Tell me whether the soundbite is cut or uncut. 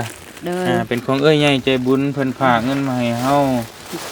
uncut